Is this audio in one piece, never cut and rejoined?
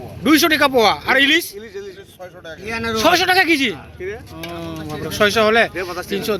yes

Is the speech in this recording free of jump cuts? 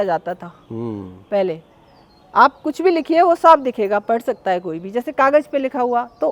yes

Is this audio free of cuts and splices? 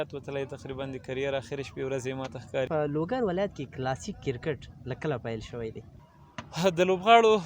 no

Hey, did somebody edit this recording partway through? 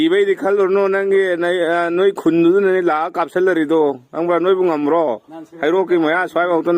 no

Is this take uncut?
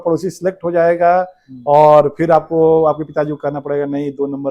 yes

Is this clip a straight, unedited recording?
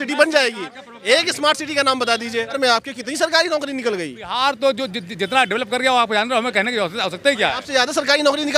no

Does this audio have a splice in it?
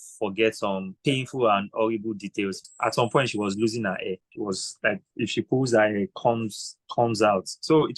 yes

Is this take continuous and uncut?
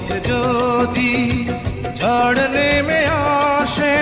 yes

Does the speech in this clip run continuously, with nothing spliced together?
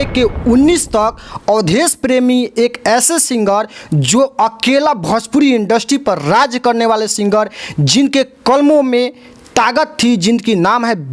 yes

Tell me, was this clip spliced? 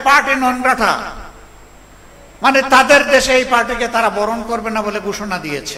no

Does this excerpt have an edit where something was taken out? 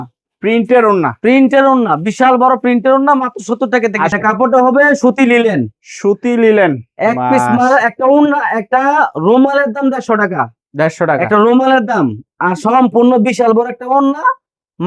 yes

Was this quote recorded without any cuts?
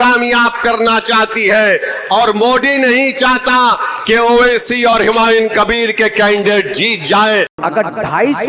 no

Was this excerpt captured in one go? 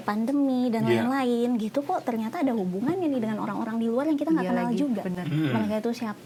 yes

